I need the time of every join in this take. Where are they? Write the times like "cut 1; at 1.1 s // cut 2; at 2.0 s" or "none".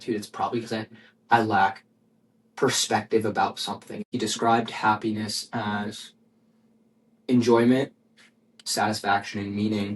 cut 1; at 4.1 s